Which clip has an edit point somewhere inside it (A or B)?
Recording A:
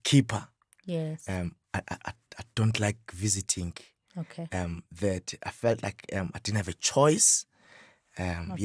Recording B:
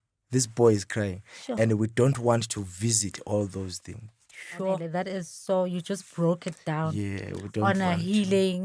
B